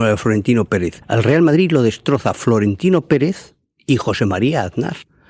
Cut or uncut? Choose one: uncut